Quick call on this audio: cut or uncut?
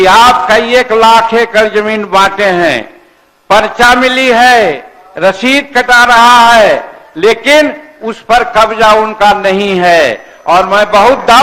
uncut